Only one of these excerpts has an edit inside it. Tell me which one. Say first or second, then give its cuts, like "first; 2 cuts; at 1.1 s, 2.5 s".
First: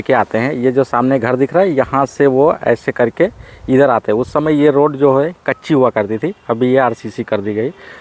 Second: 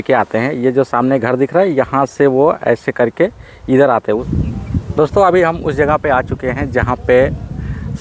second; 1 cut; at 4.2 s